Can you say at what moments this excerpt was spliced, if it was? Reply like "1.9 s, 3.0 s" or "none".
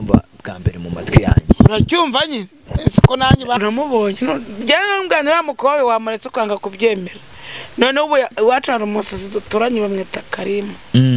3.6 s